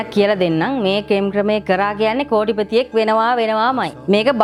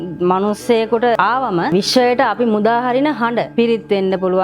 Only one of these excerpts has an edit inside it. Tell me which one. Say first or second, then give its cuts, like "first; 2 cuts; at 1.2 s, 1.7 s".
second; 1 cut; at 1.7 s